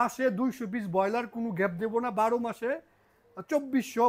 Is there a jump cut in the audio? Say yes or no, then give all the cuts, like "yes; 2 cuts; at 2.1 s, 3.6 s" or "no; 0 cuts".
no; 0 cuts